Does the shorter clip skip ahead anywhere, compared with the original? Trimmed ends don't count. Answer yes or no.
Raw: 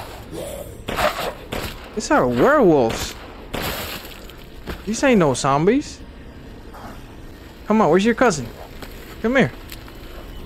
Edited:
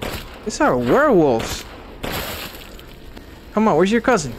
yes